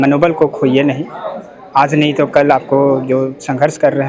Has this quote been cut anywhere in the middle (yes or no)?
no